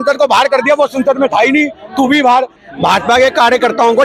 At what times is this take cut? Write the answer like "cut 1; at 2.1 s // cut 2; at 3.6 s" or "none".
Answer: cut 1; at 2.6 s

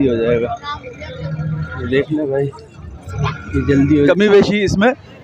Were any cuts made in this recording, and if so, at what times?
cut 1; at 4.1 s

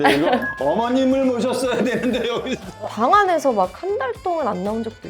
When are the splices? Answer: cut 1; at 2.8 s

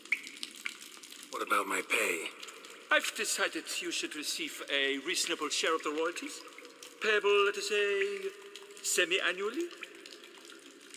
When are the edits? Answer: cut 1; at 1.4 s

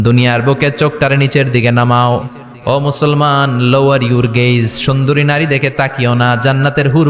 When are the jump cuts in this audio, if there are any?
none

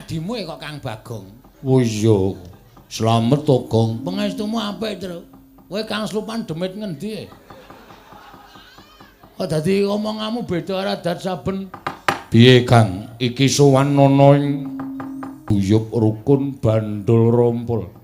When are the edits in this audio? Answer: cut 1; at 15.5 s

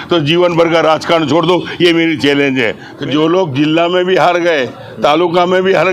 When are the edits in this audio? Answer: cut 1; at 2.8 s

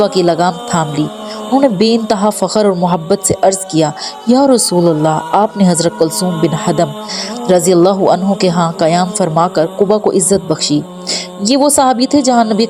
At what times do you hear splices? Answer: none

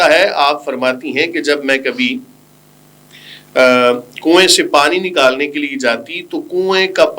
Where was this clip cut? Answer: none

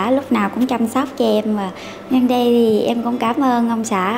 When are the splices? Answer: cut 1; at 1.9 s

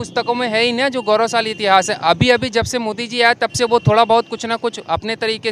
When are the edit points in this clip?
none

